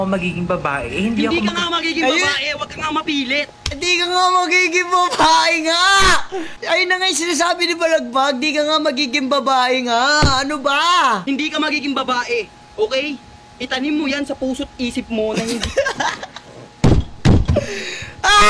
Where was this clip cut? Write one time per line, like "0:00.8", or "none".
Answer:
none